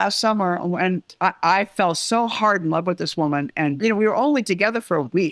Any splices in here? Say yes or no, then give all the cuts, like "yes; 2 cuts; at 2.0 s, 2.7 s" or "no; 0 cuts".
no; 0 cuts